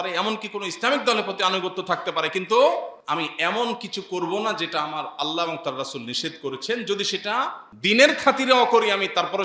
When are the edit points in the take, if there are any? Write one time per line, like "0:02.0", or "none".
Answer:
0:03.0
0:07.6